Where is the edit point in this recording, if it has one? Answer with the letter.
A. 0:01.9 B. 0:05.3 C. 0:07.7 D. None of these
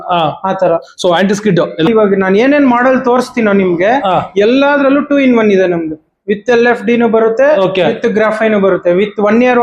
A